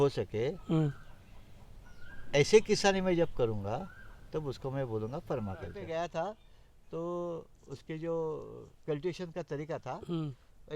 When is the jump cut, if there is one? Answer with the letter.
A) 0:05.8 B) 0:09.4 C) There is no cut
A